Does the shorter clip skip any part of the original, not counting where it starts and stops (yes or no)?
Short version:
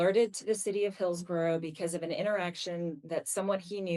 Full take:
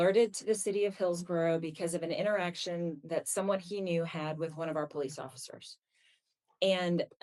no